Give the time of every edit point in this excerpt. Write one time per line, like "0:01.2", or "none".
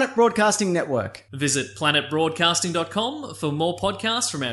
none